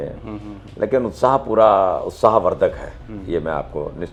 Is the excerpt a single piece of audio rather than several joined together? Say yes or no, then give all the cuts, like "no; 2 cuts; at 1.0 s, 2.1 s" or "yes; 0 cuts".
yes; 0 cuts